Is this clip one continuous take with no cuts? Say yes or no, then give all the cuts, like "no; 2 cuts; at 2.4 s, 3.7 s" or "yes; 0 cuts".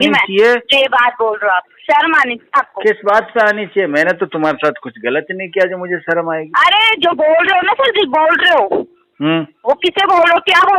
yes; 0 cuts